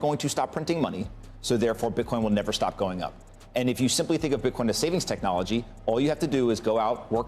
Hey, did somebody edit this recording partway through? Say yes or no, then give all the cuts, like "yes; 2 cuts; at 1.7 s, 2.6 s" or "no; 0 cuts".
yes; 1 cut; at 3.2 s